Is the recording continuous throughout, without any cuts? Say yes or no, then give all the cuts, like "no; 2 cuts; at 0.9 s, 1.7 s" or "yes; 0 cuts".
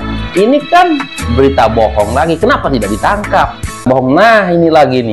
no; 1 cut; at 3.9 s